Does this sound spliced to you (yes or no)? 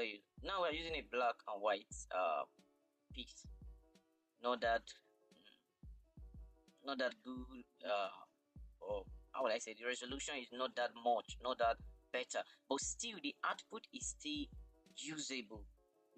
no